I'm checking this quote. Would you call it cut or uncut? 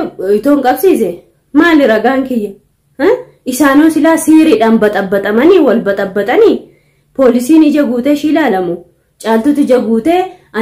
uncut